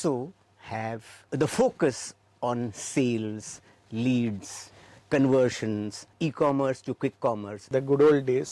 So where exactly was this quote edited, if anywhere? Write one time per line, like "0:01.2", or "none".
0:01.3
0:07.7